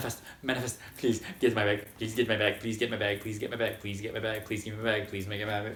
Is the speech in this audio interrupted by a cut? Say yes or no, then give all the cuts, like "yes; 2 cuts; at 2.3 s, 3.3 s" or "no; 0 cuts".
no; 0 cuts